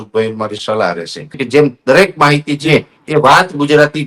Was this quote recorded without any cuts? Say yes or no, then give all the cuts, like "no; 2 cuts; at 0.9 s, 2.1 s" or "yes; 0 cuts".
no; 1 cut; at 1.4 s